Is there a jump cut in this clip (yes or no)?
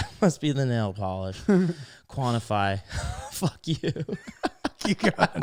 no